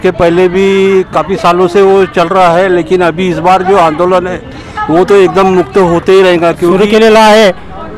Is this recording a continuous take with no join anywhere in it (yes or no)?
no